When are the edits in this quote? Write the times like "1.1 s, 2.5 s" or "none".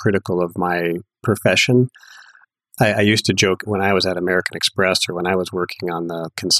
1.2 s, 3.7 s